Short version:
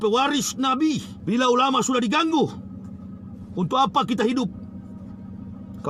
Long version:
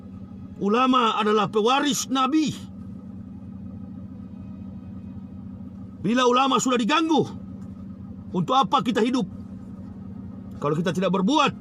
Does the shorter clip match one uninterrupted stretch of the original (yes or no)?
no